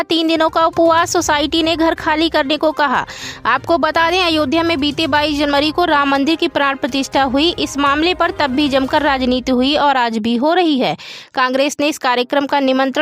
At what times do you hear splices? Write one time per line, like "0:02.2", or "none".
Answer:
none